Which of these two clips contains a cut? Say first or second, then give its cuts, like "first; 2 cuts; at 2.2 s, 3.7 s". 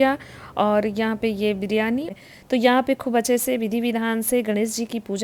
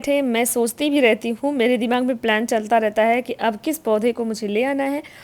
first; 1 cut; at 2.1 s